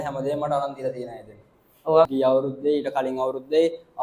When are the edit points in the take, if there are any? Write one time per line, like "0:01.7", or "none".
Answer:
0:02.1